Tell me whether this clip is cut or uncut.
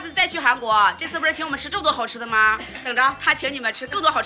cut